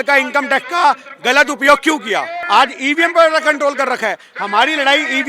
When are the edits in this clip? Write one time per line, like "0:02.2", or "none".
0:02.4